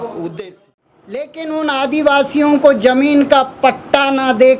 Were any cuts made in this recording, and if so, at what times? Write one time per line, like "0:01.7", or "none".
0:01.3